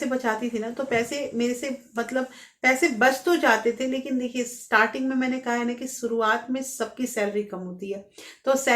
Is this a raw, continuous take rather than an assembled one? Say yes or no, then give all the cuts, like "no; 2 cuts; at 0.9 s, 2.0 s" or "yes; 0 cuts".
yes; 0 cuts